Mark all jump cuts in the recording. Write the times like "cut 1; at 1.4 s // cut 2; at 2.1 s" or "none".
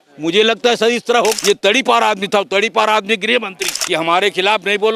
cut 1; at 1.4 s // cut 2; at 3.7 s